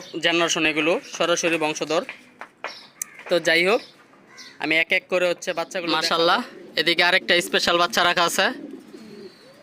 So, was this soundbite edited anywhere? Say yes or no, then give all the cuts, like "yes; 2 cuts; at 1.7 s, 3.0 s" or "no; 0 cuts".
yes; 1 cut; at 5.8 s